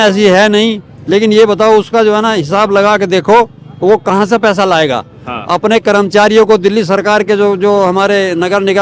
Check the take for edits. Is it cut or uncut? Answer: uncut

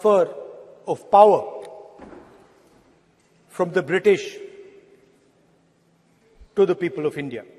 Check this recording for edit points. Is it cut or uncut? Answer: uncut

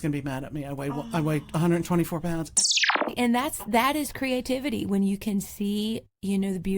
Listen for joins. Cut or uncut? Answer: cut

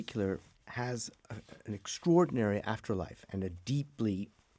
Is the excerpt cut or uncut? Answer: uncut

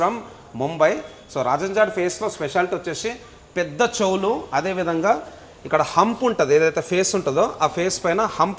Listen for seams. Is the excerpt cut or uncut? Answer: uncut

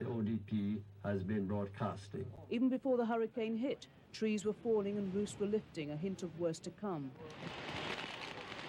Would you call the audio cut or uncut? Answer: uncut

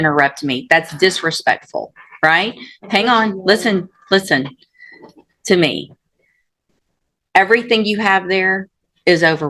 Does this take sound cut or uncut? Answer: uncut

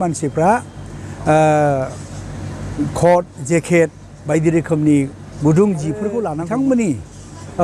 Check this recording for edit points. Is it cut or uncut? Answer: cut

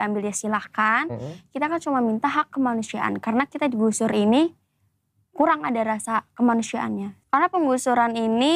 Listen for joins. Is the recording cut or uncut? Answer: cut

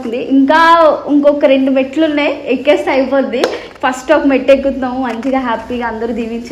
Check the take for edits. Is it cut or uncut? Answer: uncut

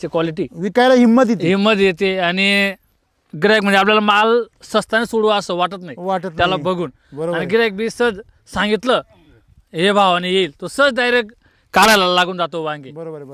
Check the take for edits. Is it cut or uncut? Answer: uncut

